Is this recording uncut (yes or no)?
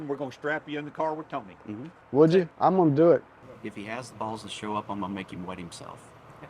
no